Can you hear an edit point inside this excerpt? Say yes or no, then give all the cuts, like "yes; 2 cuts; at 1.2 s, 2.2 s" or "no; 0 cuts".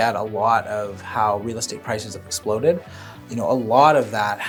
no; 0 cuts